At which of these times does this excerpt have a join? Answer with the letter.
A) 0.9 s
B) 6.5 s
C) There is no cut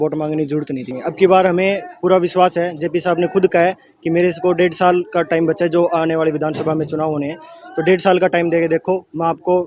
A